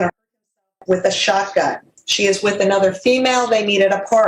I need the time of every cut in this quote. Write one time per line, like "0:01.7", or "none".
none